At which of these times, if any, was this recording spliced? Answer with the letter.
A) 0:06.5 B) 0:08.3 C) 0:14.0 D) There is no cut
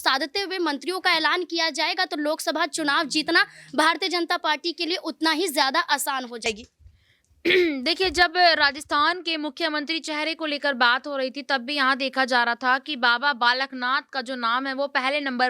A